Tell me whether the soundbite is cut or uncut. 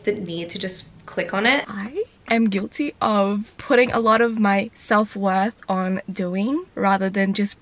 cut